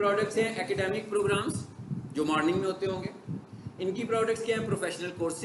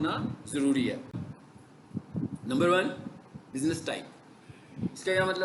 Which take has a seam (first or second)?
second